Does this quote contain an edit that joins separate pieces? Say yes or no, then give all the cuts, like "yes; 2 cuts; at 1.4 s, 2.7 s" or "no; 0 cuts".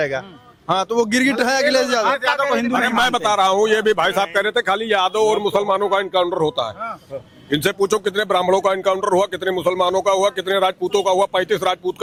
no; 0 cuts